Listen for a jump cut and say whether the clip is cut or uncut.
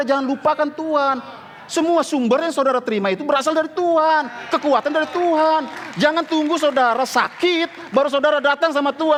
uncut